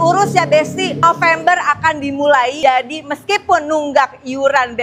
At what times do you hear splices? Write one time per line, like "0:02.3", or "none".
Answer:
none